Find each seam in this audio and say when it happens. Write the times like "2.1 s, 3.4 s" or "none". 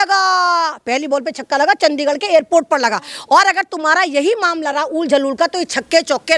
none